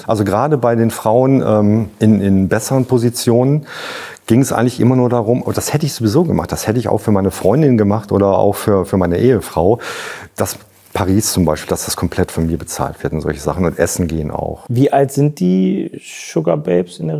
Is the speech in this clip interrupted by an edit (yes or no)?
no